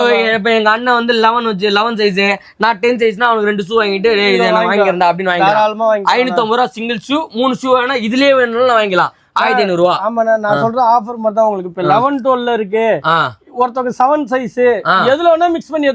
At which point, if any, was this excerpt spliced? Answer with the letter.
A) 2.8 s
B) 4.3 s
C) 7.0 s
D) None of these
D